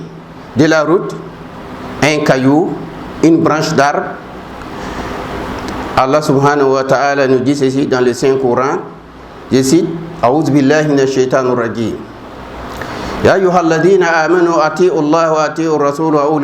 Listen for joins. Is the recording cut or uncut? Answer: cut